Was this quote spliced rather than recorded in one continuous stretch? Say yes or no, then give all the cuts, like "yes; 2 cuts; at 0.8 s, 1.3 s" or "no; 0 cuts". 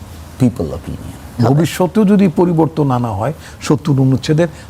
yes; 1 cut; at 1.4 s